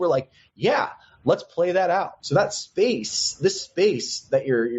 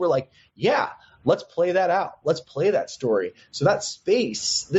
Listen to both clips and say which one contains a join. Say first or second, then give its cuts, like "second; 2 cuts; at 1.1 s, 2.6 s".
first; 1 cut; at 2.1 s